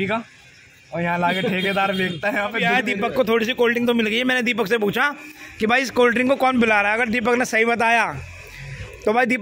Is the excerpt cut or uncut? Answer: cut